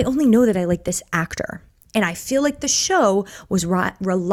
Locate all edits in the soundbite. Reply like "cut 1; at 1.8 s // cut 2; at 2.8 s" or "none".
none